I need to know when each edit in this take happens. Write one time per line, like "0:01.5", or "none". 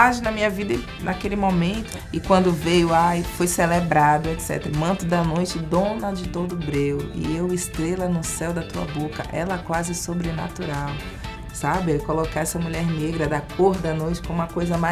0:04.6